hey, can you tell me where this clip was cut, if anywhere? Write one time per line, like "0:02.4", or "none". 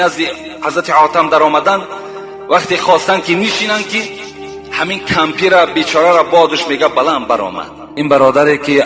0:08.0